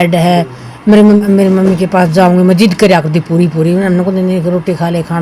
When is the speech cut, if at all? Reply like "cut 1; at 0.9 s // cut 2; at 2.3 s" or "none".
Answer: cut 1; at 1.2 s